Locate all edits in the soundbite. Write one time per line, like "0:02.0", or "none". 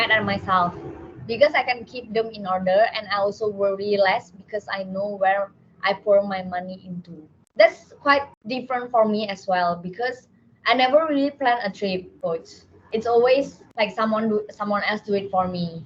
none